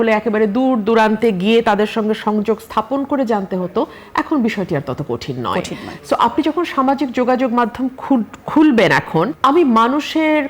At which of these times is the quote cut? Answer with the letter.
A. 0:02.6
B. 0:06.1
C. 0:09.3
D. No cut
C